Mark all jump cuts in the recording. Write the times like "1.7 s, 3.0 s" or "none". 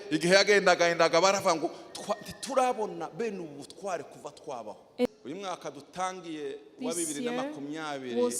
5.1 s